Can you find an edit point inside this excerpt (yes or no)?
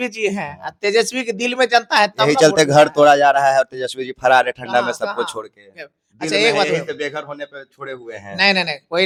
no